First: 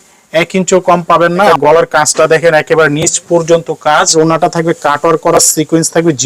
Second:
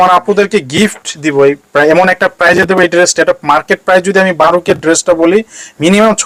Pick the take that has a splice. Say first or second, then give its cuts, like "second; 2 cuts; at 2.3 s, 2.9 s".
first; 2 cuts; at 1.5 s, 4.1 s